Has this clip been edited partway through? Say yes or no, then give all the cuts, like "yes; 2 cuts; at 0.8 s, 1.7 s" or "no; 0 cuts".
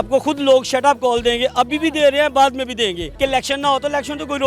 yes; 1 cut; at 3.0 s